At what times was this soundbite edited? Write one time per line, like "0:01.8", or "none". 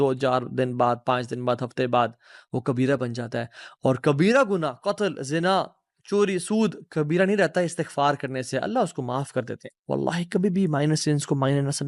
0:09.6